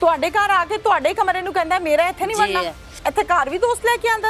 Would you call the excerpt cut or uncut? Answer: cut